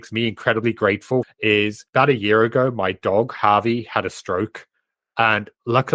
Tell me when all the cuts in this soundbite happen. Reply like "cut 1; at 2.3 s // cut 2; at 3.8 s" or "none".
cut 1; at 1.4 s